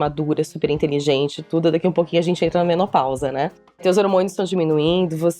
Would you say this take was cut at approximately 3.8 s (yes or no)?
yes